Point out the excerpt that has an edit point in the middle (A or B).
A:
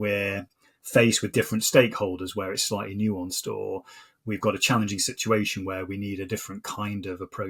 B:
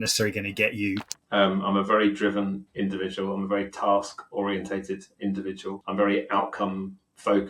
B